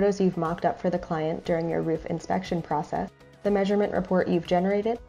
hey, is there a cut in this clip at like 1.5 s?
no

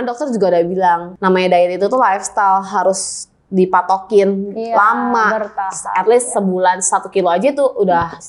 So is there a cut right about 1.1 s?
yes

